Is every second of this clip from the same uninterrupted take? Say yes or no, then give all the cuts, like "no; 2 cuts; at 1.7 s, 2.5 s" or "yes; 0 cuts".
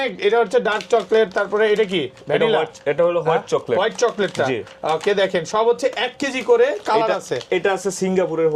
yes; 0 cuts